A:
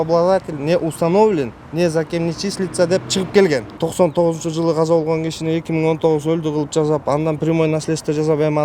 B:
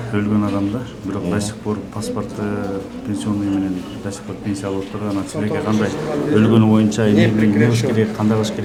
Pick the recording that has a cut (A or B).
A